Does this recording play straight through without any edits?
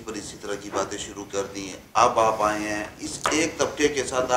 yes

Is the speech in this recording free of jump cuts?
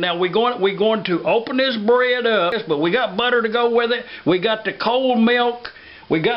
no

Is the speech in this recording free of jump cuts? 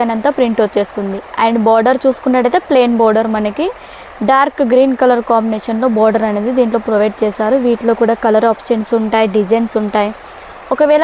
yes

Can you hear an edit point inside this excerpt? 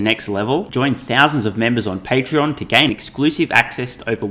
no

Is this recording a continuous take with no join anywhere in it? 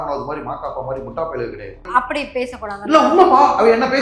no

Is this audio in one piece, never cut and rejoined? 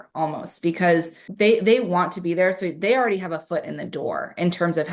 no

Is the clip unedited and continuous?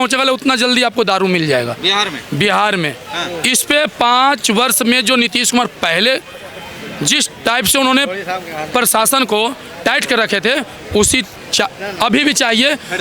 yes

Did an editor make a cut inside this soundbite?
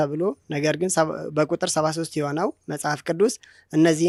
no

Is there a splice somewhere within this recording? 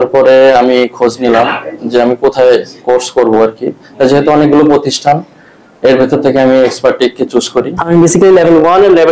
yes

